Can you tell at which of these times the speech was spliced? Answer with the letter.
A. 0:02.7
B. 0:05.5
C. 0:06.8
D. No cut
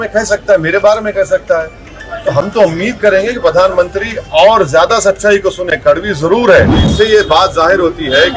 C